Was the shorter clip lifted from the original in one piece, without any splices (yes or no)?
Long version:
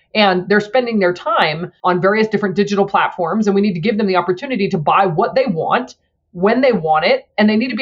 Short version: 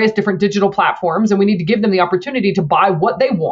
yes